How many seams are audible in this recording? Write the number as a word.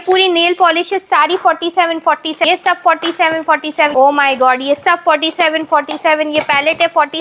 two